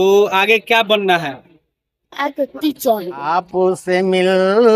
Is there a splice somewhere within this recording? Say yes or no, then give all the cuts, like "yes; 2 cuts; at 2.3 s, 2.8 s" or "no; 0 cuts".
yes; 1 cut; at 3.4 s